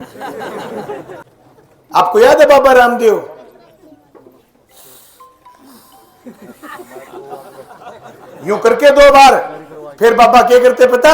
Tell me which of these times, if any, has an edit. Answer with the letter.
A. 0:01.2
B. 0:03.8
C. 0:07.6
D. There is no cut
A